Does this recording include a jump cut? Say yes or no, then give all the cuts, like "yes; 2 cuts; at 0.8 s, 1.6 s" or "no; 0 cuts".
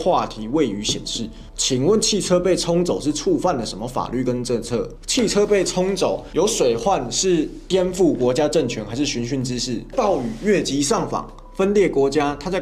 no; 0 cuts